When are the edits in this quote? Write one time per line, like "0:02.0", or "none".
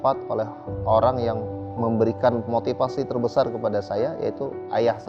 none